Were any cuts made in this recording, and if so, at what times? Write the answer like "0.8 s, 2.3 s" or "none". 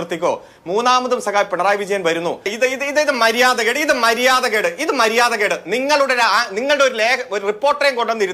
2.4 s